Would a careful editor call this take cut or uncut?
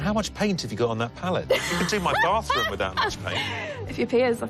cut